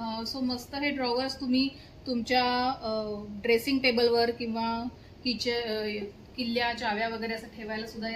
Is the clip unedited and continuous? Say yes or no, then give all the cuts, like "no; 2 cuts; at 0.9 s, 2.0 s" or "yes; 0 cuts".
yes; 0 cuts